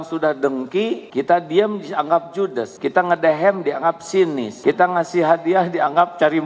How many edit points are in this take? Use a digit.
3